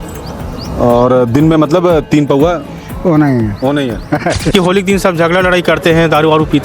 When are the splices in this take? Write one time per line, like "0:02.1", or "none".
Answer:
0:04.5